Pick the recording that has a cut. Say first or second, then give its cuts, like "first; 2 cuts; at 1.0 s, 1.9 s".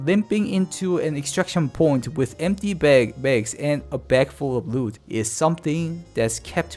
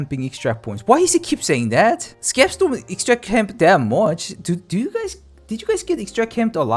first; 1 cut; at 5.0 s